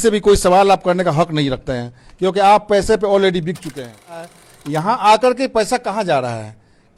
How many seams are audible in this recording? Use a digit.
1